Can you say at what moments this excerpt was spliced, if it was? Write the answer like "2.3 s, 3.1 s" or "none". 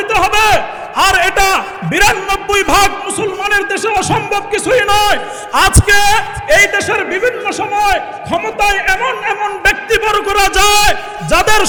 none